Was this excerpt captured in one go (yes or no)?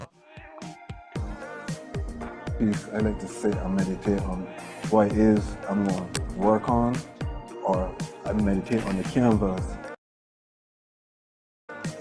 yes